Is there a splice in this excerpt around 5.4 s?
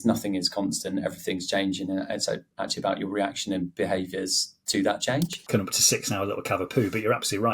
yes; 1 cut; at 5.4 s

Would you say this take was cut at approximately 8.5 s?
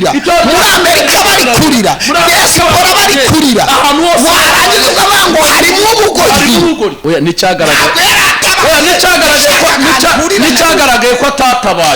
no; 1 cut; at 7.0 s

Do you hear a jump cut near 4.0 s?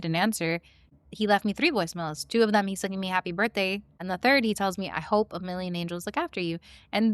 yes; 2 cuts; at 0.9 s, 4.0 s

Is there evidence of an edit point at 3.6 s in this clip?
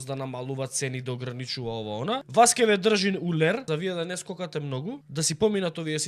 yes; 3 cuts; at 2.3 s, 3.6 s, 5.0 s

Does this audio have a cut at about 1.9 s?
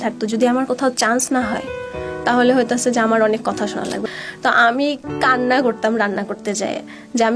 no; 1 cut; at 4.0 s

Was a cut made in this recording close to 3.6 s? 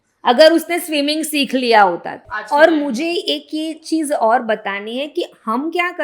no; 1 cut; at 2.3 s

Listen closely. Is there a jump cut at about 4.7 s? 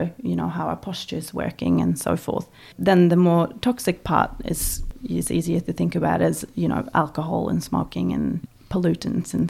yes; 3 cuts; at 2.7 s, 4.7 s, 8.4 s

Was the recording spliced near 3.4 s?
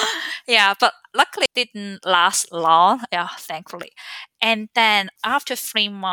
no; 2 cuts; at 1.5 s, 5.1 s

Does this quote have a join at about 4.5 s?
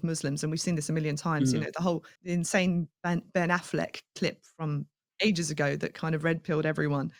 no; 2 cuts; at 2.1 s, 2.9 s

